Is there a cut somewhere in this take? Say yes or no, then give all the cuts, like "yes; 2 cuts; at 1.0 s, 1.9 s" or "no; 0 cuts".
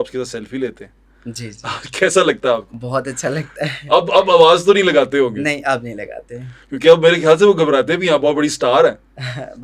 no; 0 cuts